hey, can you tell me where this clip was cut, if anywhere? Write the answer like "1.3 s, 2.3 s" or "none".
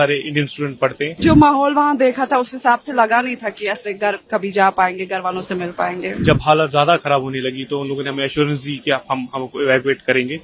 1.2 s, 6.1 s